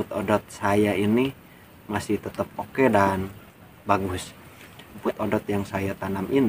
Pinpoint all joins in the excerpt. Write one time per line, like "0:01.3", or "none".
0:05.0